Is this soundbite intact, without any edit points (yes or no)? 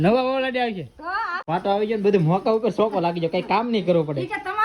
no